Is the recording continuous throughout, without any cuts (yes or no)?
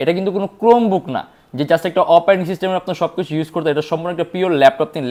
yes